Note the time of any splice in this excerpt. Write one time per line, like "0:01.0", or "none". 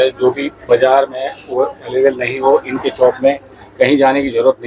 none

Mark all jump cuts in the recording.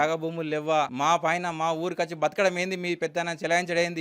0:00.9

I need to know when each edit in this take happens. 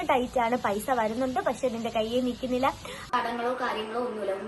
0:03.0

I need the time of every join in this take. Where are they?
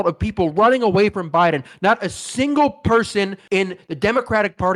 0:03.4

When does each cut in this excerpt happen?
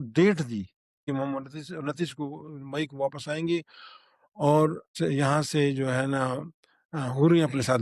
0:01.1
0:04.8

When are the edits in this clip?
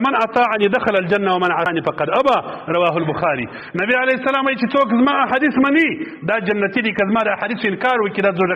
0:01.7

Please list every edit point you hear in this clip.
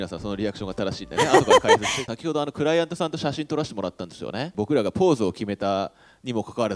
0:02.0
0:04.5

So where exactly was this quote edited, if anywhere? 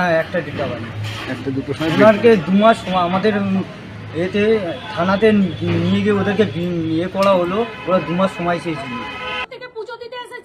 0:09.5

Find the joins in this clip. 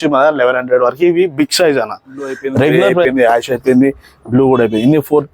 0:03.0

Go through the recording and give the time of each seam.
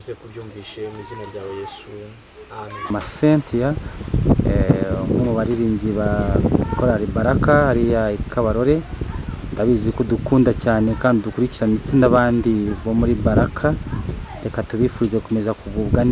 0:02.9

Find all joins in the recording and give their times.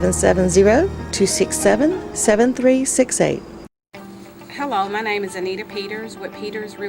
0:03.7

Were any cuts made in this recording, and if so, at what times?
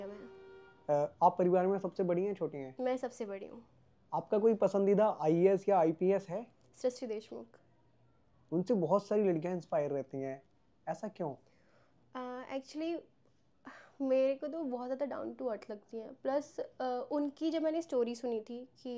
none

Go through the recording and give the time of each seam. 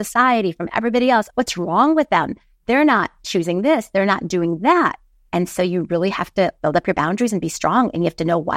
0:01.3
0:03.2
0:06.5

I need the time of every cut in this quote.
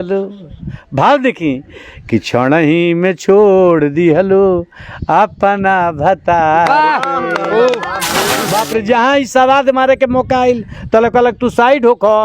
0:08.3

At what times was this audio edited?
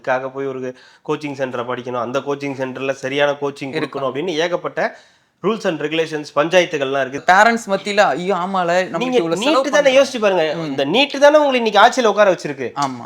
0:07.2

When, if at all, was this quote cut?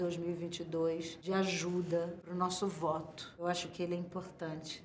0:01.1
0:02.2
0:03.2

